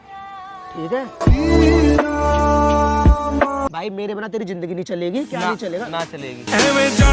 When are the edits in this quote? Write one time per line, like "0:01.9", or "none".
0:03.7